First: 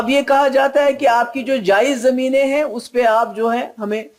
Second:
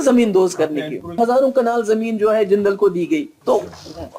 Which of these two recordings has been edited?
second; 2 cuts; at 1.2 s, 3.3 s

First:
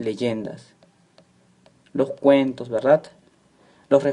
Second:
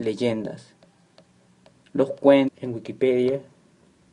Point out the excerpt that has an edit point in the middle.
first; 1 cut; at 2.6 s

